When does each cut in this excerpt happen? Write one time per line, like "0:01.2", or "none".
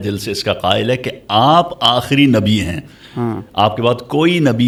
none

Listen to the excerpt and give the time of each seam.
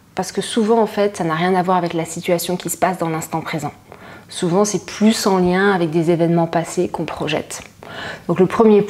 none

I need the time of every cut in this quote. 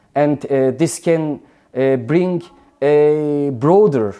none

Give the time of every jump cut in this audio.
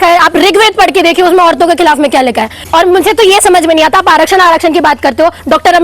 0:02.6

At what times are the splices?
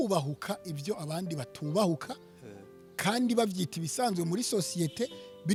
none

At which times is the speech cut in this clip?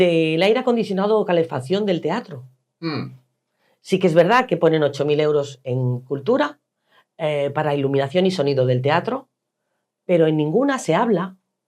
0:03.7

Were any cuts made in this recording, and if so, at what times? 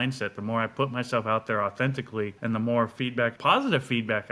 0:02.4
0:03.3

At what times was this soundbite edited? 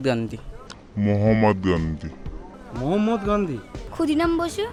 none

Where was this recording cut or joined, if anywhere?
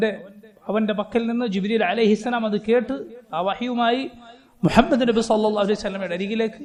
none

